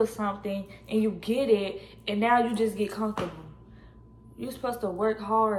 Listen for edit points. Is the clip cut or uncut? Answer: uncut